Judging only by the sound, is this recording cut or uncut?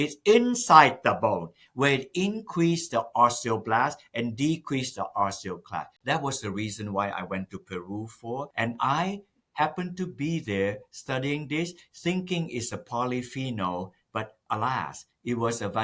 cut